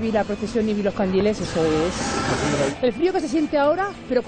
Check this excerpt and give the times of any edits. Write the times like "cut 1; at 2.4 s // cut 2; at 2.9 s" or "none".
none